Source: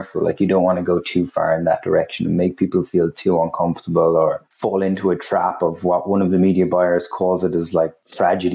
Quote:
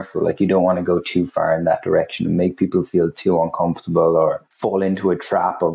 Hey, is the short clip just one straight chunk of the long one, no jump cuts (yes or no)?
yes